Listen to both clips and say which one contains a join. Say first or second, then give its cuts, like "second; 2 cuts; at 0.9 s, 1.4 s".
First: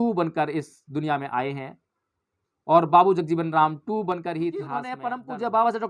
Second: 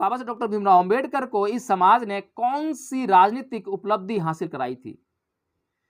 first; 1 cut; at 4.9 s